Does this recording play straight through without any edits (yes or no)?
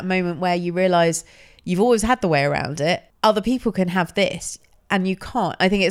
no